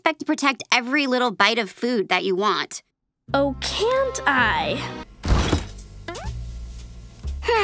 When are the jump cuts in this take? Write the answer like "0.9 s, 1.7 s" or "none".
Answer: 4.9 s